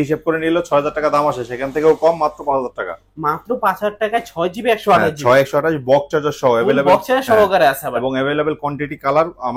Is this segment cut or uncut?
uncut